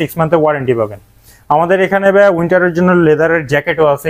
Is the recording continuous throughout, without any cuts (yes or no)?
yes